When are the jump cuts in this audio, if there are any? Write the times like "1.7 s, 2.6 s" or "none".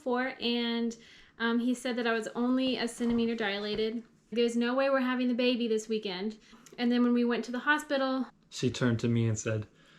4.3 s, 6.6 s, 8.3 s